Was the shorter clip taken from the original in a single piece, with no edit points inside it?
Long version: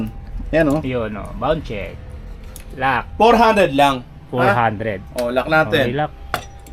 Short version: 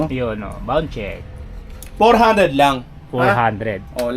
no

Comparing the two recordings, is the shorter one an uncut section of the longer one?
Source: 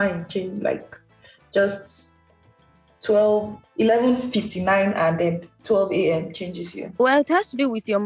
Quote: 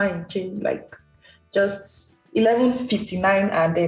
no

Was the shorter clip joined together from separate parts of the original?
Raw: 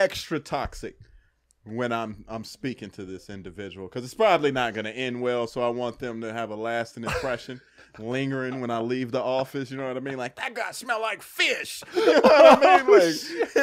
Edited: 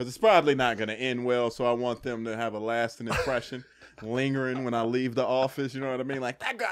no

